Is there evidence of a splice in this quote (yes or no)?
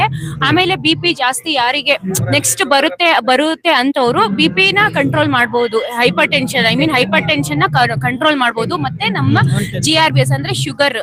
no